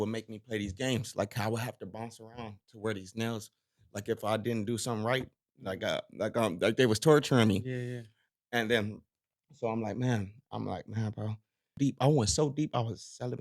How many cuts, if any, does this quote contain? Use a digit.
1